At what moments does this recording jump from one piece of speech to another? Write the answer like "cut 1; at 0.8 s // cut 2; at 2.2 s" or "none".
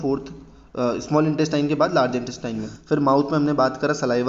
cut 1; at 2.7 s